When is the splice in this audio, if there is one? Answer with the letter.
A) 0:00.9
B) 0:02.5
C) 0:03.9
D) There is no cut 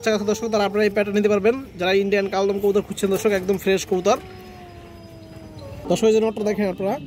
D